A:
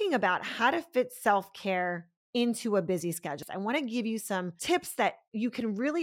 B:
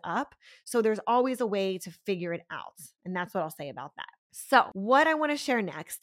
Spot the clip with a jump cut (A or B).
A